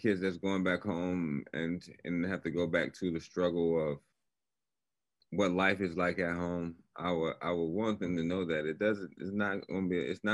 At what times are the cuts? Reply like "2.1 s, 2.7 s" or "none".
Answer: none

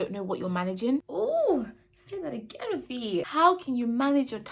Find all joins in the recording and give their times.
1.1 s, 3.3 s

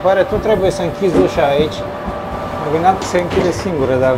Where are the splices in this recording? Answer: 2.5 s

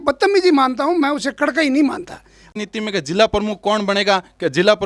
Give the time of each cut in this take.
2.5 s

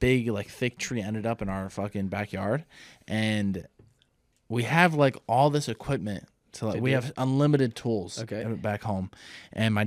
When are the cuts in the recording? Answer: none

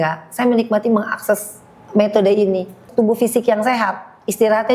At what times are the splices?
2.9 s

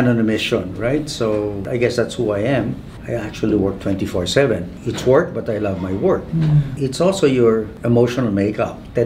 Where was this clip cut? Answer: 4.8 s

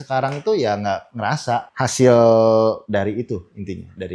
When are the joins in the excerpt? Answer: 1.4 s, 2.8 s

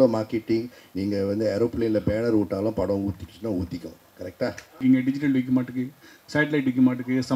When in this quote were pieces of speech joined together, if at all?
4.8 s

